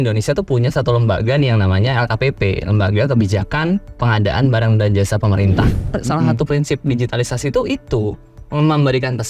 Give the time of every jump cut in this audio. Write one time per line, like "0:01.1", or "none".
0:05.8